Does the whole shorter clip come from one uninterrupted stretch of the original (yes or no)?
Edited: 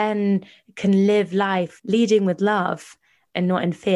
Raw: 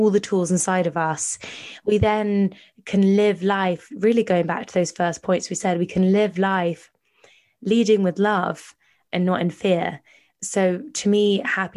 no